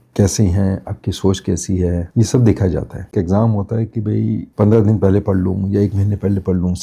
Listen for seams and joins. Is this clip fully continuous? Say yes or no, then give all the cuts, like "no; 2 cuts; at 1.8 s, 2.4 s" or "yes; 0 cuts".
no; 1 cut; at 3.1 s